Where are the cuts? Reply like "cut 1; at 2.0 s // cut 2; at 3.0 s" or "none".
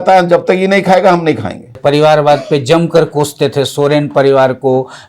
cut 1; at 1.7 s